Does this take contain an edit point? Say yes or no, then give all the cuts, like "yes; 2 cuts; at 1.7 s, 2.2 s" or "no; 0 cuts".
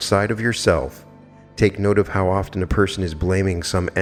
no; 0 cuts